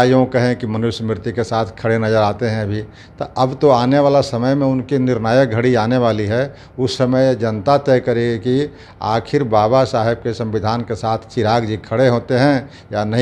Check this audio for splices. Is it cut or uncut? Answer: uncut